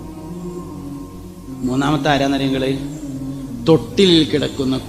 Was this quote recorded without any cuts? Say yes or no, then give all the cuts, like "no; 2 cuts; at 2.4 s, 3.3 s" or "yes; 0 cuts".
no; 1 cut; at 1.2 s